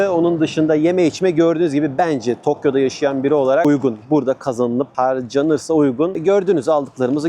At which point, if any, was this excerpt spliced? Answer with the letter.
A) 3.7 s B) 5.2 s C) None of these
A